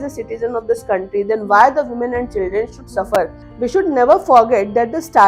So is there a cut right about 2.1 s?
no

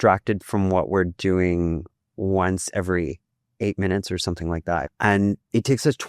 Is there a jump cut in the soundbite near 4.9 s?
yes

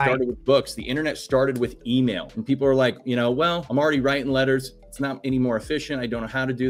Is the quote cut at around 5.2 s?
no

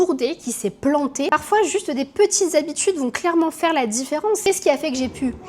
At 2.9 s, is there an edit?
no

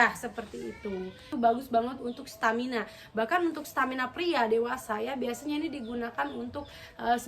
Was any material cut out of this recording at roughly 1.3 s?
yes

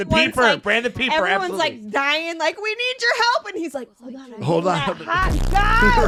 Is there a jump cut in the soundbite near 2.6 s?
no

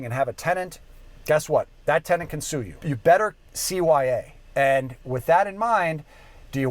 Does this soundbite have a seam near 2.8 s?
yes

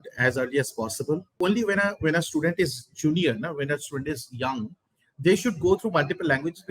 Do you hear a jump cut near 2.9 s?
no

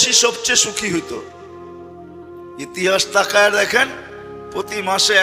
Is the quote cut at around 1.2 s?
yes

